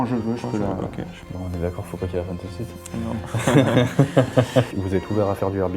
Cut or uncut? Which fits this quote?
cut